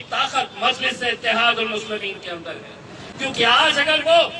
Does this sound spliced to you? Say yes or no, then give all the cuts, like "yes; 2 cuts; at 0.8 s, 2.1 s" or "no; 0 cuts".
no; 0 cuts